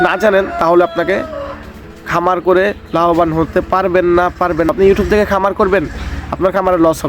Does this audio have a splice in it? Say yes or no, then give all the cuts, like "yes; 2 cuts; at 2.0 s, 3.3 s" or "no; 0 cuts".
yes; 1 cut; at 4.7 s